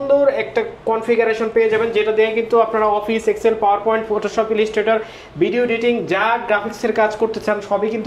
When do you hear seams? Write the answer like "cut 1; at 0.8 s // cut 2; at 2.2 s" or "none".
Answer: none